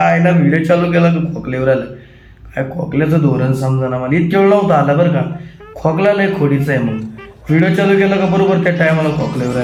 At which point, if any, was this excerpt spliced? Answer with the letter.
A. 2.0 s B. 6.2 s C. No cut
C